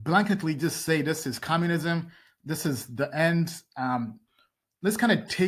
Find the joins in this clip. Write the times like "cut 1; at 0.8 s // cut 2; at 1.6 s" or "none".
none